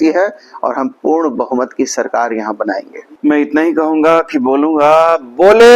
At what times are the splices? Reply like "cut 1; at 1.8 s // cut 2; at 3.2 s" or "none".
cut 1; at 3.0 s